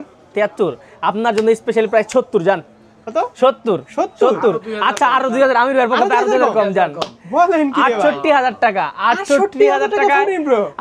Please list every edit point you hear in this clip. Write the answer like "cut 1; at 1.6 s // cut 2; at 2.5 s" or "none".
none